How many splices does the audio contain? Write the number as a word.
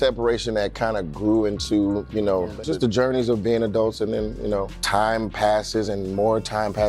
two